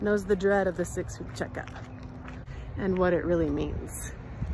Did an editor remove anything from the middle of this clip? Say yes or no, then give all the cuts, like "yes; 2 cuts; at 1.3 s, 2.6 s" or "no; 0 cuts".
yes; 1 cut; at 2.5 s